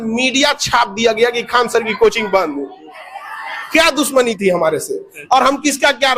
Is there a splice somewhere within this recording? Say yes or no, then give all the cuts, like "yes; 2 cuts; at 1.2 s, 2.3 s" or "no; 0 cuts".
no; 0 cuts